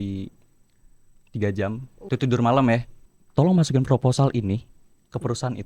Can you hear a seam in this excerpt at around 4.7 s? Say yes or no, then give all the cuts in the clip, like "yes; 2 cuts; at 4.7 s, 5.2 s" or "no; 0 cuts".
no; 2 cuts; at 1.9 s, 2.9 s